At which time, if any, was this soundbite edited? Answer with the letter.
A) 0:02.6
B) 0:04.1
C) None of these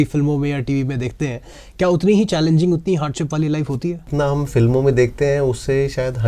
B